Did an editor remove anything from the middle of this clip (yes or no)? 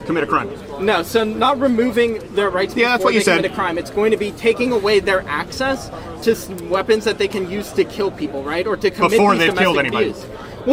no